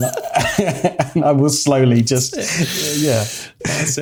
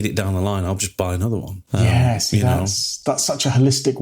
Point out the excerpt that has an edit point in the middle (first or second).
second